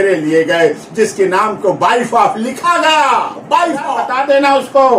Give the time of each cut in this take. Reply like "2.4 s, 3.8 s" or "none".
4.1 s